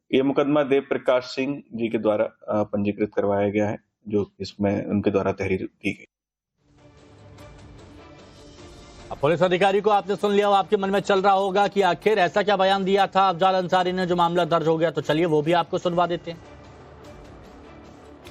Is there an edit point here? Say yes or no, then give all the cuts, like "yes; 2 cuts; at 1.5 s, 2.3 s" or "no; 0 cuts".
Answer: no; 0 cuts